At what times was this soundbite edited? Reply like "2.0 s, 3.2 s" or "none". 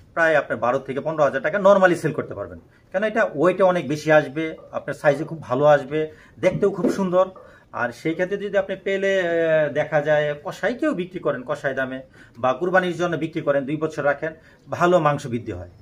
none